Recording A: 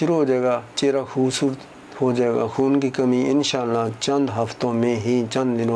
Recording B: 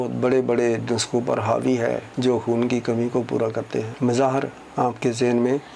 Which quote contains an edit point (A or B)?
B